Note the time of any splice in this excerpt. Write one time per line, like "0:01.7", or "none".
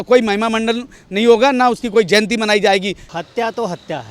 0:03.0